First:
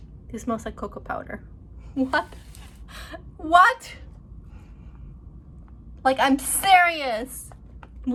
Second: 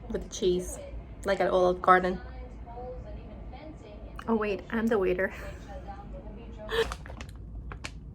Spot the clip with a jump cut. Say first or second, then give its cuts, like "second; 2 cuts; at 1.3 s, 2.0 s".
second; 1 cut; at 6.8 s